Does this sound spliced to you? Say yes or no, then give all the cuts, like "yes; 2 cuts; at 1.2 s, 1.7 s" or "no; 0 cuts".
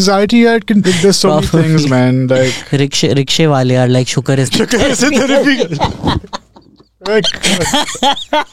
no; 0 cuts